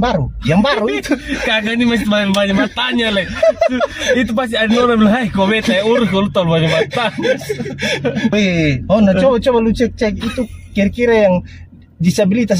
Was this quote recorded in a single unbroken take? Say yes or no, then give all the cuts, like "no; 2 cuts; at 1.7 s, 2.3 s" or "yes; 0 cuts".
no; 1 cut; at 8.3 s